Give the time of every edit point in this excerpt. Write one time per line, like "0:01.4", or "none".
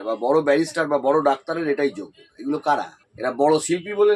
0:03.0